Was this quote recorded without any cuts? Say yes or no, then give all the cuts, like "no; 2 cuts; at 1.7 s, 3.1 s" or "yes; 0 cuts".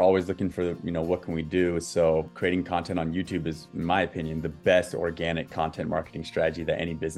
no; 1 cut; at 2.3 s